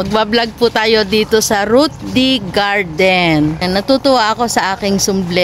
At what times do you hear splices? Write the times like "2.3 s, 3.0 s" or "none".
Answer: 3.6 s